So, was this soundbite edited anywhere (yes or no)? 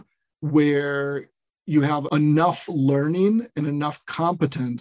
no